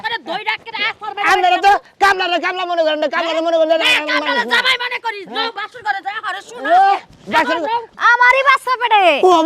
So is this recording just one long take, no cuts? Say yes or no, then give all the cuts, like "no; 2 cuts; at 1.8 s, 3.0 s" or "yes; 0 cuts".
no; 1 cut; at 7.9 s